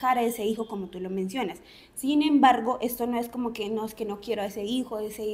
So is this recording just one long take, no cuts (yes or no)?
yes